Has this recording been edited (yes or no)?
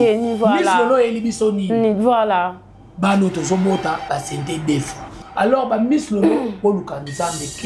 yes